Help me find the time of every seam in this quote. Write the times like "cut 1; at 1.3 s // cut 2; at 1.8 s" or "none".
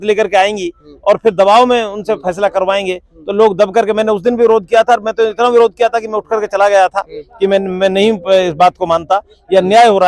none

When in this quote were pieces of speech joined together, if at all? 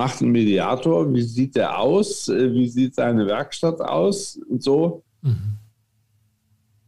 none

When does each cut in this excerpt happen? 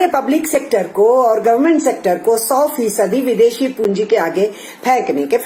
none

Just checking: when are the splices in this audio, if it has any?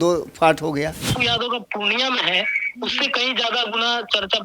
cut 1; at 1.1 s

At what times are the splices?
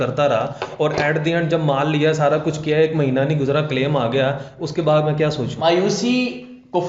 cut 1; at 5.5 s

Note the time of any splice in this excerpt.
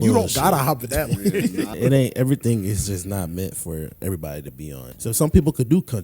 cut 1; at 1.7 s // cut 2; at 4.9 s

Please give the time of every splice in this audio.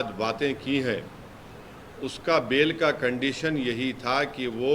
none

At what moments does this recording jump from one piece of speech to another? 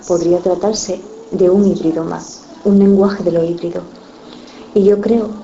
cut 1; at 2.8 s

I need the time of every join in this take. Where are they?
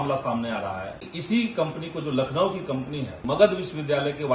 cut 1; at 1.1 s // cut 2; at 3.2 s

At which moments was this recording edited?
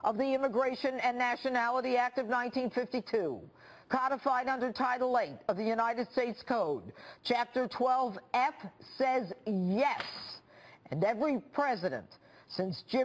cut 1; at 9.3 s

